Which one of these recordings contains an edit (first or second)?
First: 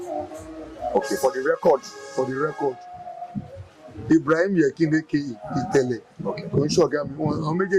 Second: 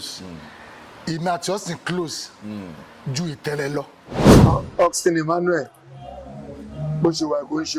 second